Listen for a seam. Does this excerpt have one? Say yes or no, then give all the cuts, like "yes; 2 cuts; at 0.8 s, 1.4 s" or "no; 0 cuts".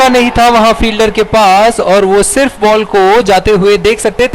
no; 0 cuts